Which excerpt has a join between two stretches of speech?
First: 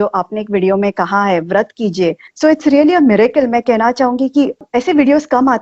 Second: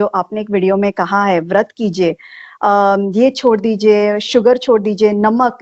first; 2 cuts; at 2.3 s, 4.6 s

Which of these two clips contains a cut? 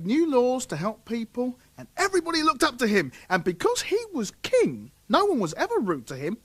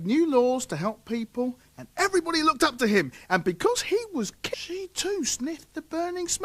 first; 1 cut; at 4.4 s

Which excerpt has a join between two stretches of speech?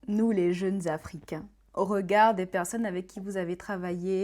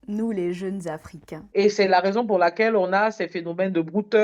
second; 1 cut; at 1.5 s

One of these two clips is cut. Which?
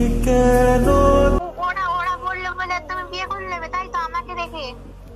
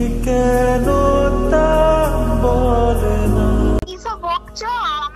first; 1 cut; at 1.4 s

